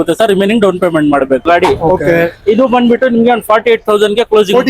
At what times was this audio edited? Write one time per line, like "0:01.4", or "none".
0:01.4